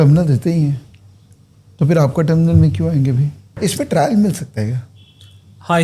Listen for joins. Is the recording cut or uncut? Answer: cut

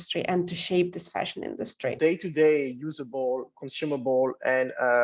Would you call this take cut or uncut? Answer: cut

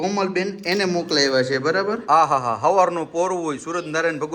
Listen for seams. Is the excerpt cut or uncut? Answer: cut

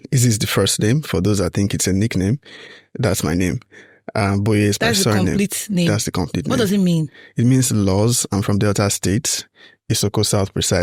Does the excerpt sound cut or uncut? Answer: uncut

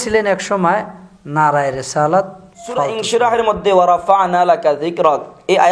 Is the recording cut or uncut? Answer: cut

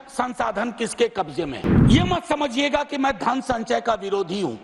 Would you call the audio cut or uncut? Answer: cut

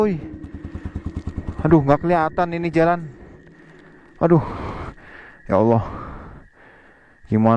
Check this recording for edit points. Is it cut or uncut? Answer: uncut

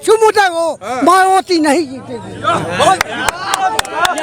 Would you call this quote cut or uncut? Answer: uncut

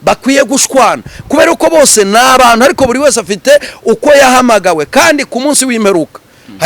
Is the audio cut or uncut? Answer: uncut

